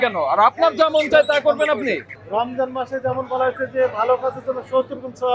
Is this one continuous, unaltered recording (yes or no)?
no